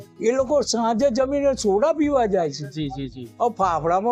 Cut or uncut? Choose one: uncut